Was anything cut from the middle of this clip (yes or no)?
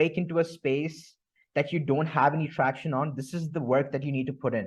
no